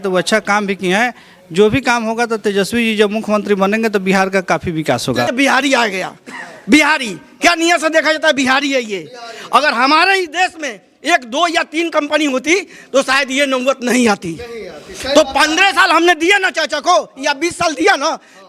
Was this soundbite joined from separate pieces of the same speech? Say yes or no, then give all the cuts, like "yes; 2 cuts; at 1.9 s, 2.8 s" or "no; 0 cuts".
yes; 1 cut; at 5.3 s